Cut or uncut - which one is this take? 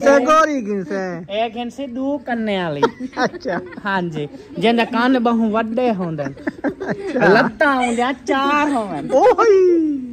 uncut